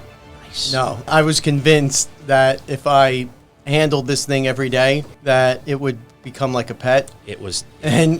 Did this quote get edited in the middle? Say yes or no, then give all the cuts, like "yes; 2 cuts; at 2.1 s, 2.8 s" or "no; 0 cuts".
yes; 2 cuts; at 1.1 s, 5.1 s